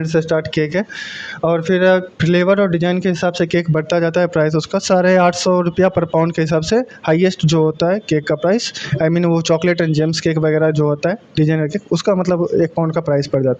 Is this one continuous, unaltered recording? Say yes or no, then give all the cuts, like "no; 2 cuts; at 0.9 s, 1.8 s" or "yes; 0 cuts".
yes; 0 cuts